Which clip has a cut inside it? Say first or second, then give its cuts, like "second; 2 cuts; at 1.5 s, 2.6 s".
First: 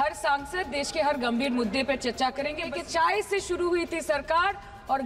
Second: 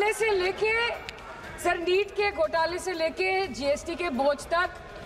first; 1 cut; at 2.7 s